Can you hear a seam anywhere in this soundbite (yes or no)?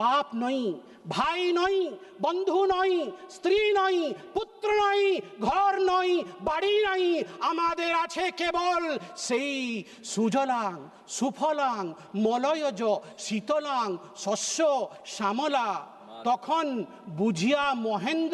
no